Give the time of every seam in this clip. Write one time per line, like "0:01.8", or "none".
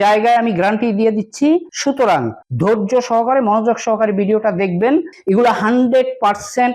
0:05.1